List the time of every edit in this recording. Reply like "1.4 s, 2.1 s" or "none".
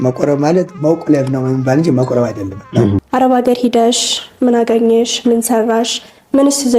3.0 s

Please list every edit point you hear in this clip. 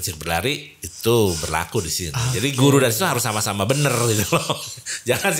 none

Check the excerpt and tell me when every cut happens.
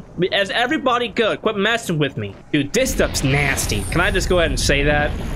2.3 s

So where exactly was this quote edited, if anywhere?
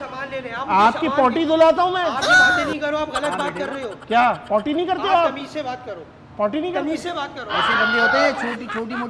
none

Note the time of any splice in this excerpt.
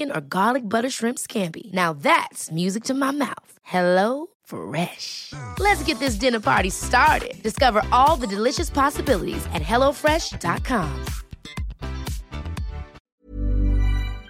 13.1 s

